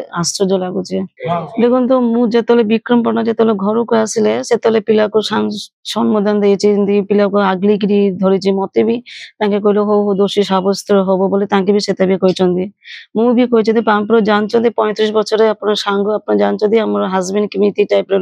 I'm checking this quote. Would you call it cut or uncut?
cut